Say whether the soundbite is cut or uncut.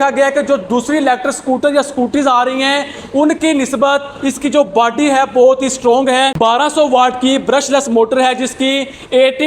cut